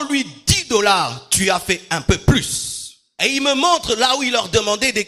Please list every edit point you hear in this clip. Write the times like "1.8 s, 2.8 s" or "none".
3.1 s